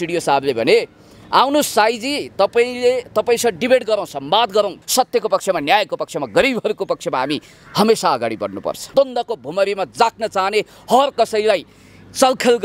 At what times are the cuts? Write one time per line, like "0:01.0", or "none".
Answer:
0:04.8
0:08.9